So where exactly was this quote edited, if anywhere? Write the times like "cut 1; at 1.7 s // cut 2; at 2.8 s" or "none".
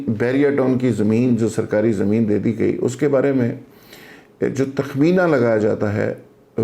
none